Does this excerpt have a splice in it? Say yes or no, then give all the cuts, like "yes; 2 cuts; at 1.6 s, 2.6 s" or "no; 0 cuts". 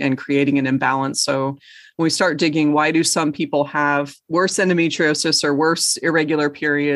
yes; 1 cut; at 4.2 s